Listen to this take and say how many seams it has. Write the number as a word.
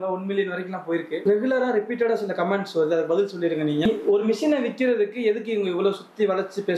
two